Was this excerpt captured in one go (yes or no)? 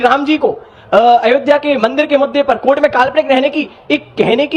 yes